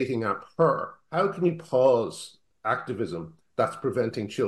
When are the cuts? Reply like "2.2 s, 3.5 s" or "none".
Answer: 1.0 s